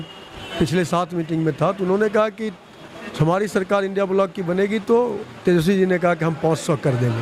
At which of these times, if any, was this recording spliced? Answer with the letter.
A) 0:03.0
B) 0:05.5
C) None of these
C